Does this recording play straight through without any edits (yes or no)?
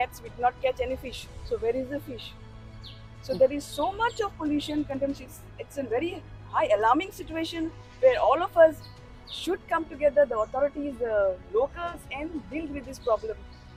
yes